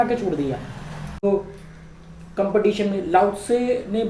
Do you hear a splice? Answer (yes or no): yes